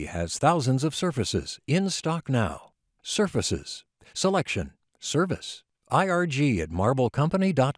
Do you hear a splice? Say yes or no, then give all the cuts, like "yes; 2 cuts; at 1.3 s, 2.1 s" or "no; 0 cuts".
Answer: no; 0 cuts